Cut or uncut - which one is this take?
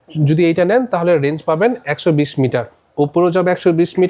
uncut